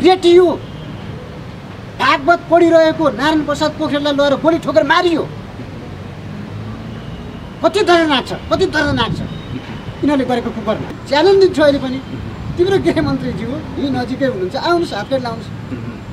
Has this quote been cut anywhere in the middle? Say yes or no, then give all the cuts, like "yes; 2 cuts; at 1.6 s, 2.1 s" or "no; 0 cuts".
yes; 1 cut; at 11.0 s